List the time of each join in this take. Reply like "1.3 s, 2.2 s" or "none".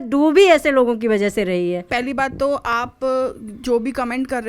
1.8 s